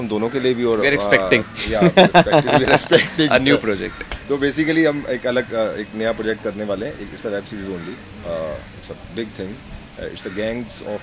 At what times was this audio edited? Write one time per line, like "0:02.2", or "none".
none